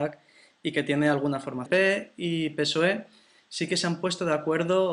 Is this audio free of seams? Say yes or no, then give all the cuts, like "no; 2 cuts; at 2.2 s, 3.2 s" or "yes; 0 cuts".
yes; 0 cuts